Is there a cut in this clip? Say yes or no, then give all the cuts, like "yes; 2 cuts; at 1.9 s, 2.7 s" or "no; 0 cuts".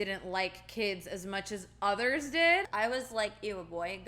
yes; 1 cut; at 2.7 s